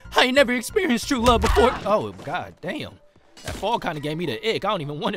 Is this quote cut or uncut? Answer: uncut